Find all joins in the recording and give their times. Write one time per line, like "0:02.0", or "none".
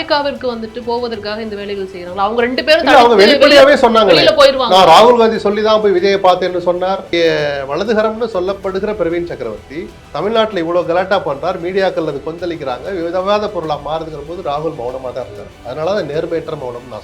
0:07.1